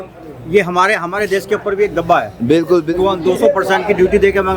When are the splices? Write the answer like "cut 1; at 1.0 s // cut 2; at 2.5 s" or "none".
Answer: cut 1; at 2.9 s